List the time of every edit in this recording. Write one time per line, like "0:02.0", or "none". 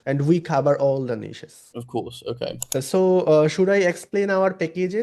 0:02.6